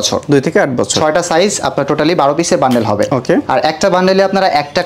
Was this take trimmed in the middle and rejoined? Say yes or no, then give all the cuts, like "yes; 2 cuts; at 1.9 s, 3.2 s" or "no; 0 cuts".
no; 0 cuts